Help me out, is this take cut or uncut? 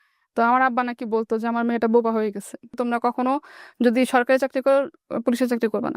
cut